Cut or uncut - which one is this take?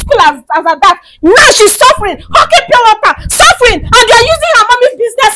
uncut